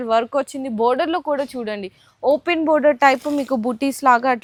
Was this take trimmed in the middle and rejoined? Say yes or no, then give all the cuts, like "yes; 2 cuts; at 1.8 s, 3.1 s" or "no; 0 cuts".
no; 0 cuts